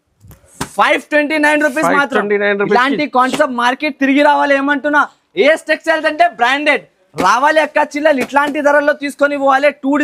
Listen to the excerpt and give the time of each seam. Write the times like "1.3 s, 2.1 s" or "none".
none